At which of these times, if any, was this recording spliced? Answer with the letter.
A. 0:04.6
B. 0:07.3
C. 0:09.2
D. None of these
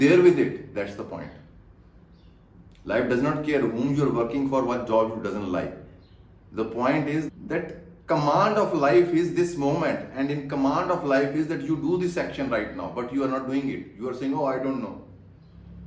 B